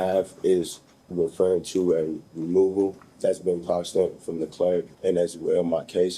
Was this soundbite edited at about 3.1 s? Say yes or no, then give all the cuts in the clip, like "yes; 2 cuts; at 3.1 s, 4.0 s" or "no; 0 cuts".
yes; 2 cuts; at 3.1 s, 4.9 s